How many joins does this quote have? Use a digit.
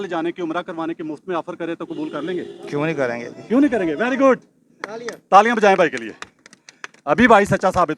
0